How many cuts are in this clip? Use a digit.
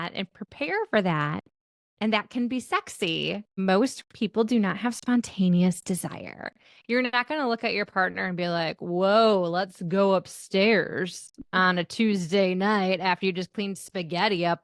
1